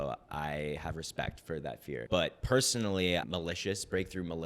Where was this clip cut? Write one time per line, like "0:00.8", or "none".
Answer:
0:02.0
0:03.3